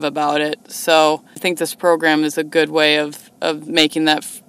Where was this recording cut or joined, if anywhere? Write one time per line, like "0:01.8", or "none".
0:01.4